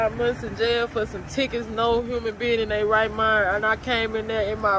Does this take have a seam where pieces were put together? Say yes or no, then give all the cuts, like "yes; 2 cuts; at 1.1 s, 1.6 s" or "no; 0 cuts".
no; 0 cuts